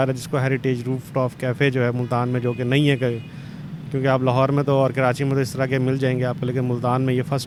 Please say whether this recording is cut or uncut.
uncut